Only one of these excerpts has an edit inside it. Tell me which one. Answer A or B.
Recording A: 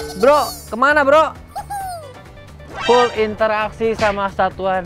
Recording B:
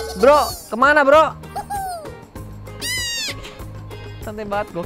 A